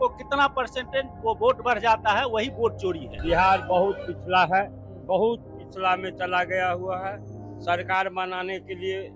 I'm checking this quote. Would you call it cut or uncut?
cut